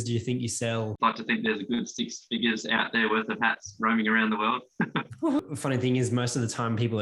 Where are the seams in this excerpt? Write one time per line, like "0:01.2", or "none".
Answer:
0:00.9
0:05.4